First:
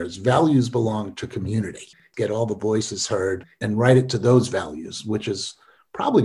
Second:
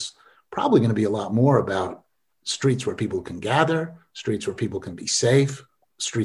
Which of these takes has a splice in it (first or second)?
first